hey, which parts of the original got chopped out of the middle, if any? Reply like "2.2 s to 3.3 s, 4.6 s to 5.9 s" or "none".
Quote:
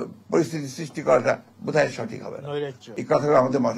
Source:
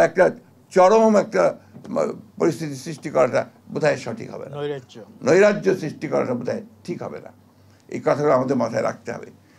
4.9 s to 7.8 s